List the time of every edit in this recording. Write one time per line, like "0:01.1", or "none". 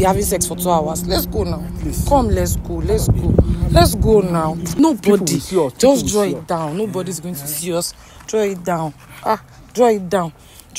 0:04.7